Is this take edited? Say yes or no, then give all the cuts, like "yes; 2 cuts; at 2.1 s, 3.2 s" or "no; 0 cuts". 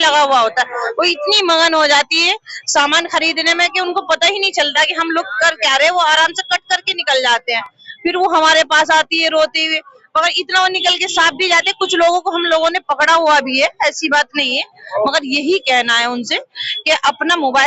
no; 0 cuts